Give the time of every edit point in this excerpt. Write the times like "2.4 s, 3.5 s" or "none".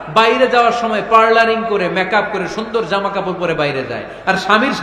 none